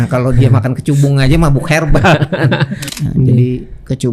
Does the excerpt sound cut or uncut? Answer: cut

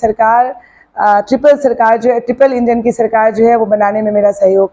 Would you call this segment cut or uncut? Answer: uncut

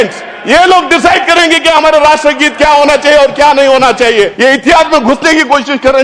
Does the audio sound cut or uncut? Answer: cut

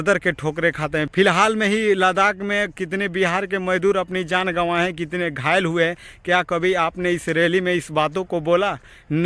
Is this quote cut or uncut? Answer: cut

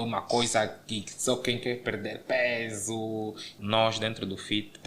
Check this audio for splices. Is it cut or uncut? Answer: cut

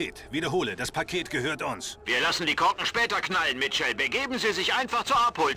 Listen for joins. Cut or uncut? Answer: cut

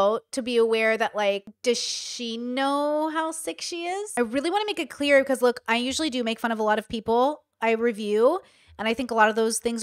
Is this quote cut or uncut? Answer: cut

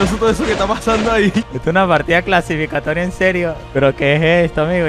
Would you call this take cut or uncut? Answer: cut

